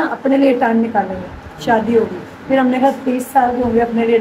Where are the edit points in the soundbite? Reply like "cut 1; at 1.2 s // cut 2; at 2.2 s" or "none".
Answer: none